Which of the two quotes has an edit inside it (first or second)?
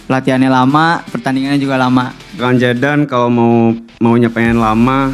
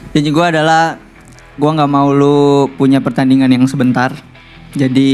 first